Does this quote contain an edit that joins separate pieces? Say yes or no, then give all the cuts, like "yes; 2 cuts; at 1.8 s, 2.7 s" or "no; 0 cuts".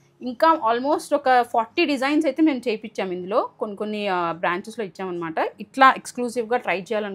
no; 0 cuts